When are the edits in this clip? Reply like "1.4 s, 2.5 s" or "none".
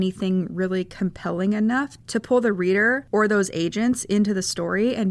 2.0 s